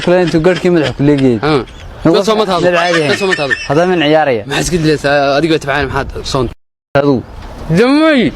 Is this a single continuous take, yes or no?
no